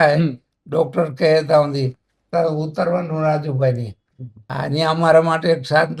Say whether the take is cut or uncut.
cut